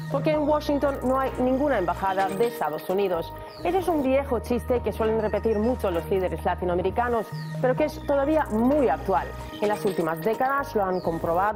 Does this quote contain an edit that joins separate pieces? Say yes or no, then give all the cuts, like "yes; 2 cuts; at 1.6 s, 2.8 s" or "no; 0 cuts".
no; 0 cuts